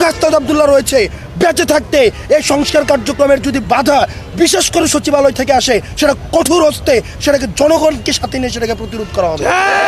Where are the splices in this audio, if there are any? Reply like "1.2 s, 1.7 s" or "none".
none